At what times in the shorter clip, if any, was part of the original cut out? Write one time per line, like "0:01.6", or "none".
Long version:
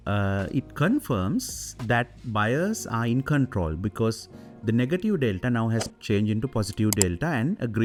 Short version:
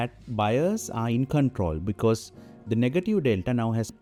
none